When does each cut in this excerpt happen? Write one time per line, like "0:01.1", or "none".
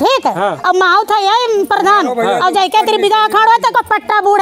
none